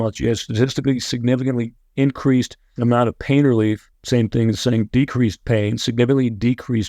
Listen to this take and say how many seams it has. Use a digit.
2